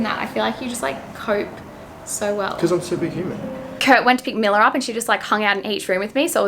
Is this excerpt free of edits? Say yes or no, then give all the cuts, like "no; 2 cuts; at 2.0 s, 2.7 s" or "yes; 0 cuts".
no; 1 cut; at 3.7 s